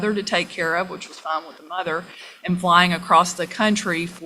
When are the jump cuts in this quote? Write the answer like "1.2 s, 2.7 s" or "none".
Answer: none